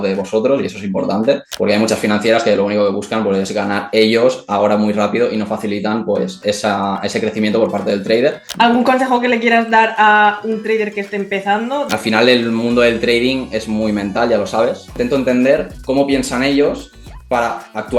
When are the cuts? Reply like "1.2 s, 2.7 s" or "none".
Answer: 1.5 s, 8.4 s, 11.9 s, 15.0 s